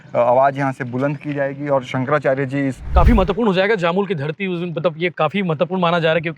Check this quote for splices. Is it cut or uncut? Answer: cut